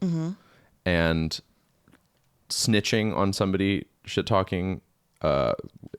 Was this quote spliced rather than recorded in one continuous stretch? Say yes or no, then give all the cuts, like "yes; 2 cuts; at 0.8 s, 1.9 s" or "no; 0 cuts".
no; 0 cuts